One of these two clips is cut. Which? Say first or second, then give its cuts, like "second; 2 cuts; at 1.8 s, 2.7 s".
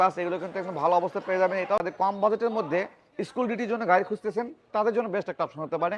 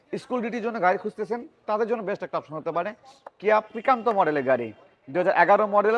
first; 1 cut; at 1.8 s